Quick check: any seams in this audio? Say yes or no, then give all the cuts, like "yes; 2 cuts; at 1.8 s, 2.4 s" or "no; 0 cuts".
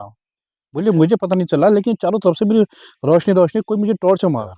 no; 0 cuts